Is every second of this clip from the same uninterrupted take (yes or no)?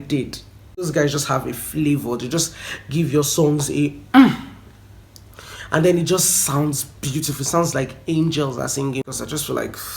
no